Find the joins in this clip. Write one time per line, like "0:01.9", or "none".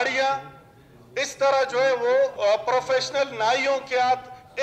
0:02.3